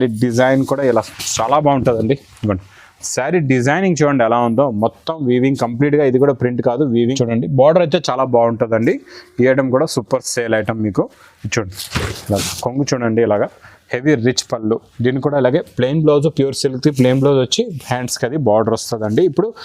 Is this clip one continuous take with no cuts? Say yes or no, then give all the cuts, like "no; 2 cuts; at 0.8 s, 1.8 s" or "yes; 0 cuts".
no; 1 cut; at 7.1 s